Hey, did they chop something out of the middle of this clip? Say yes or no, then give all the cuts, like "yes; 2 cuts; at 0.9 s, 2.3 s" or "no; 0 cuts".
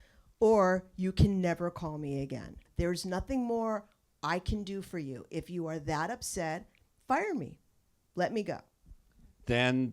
yes; 1 cut; at 2.7 s